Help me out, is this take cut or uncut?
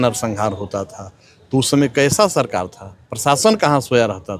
uncut